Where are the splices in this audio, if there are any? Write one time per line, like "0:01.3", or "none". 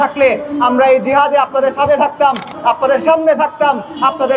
none